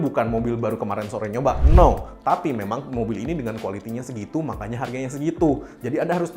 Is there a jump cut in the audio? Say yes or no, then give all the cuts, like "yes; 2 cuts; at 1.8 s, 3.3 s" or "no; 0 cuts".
no; 0 cuts